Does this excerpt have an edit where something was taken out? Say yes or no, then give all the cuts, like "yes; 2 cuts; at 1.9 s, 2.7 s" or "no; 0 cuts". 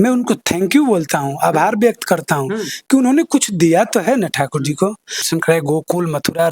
yes; 1 cut; at 5.3 s